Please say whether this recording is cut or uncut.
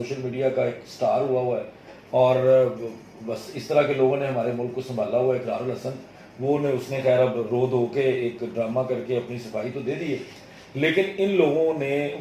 uncut